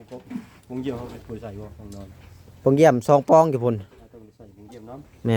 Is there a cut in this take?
no; 0 cuts

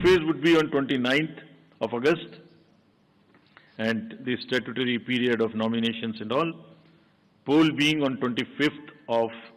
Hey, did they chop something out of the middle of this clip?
no; 0 cuts

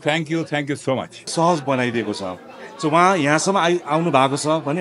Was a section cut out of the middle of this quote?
yes; 1 cut; at 1.3 s

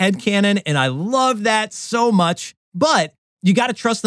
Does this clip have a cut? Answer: no; 0 cuts

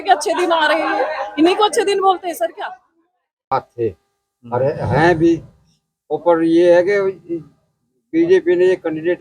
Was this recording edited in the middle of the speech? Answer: yes; 1 cut; at 3.4 s

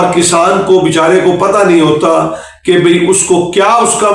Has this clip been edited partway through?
no; 0 cuts

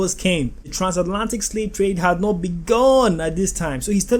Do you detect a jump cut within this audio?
no; 0 cuts

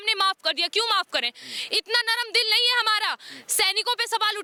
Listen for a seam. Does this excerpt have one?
no; 0 cuts

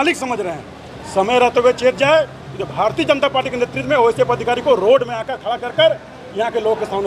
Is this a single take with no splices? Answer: yes; 0 cuts

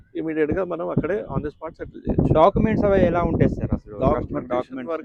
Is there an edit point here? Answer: no; 0 cuts

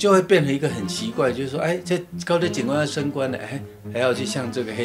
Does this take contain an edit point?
no; 0 cuts

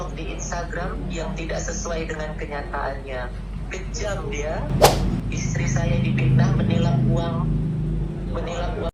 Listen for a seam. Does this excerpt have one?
no; 0 cuts

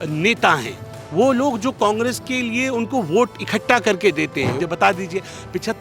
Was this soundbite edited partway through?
yes; 1 cut; at 4.6 s

